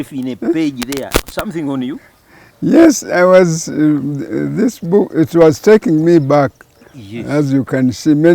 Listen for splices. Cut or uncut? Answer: uncut